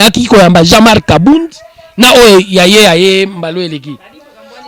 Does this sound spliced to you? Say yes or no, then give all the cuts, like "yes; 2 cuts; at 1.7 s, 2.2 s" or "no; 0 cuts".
no; 0 cuts